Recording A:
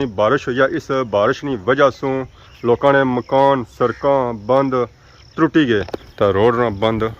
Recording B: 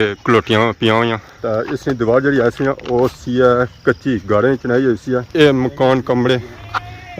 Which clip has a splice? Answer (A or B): A